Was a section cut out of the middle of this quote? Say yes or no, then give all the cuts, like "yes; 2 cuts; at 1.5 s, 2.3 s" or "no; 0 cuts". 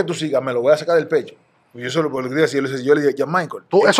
no; 0 cuts